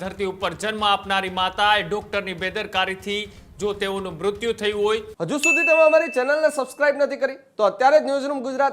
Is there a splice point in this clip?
yes; 1 cut; at 5.1 s

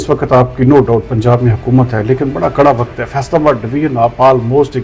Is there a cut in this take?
no; 0 cuts

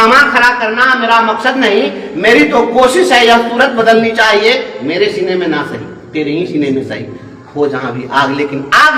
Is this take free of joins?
yes; 0 cuts

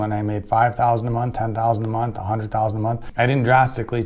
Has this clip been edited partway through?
yes; 1 cut; at 3.0 s

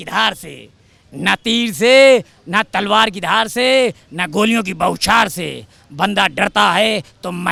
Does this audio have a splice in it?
no; 0 cuts

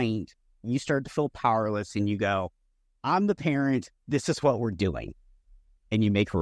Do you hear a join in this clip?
no; 0 cuts

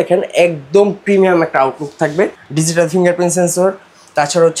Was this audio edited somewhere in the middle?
yes; 1 cut; at 2.4 s

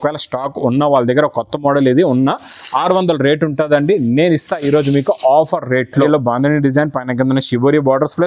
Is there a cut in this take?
yes; 1 cut; at 6.1 s

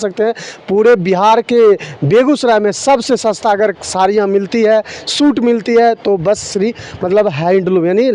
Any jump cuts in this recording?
no; 0 cuts

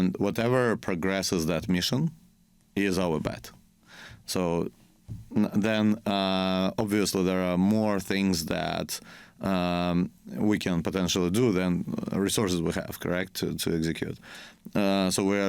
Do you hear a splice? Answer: no; 0 cuts

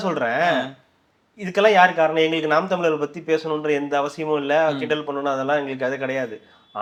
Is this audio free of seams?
yes; 0 cuts

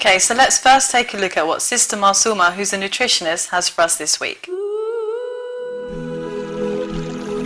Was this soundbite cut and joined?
no; 0 cuts

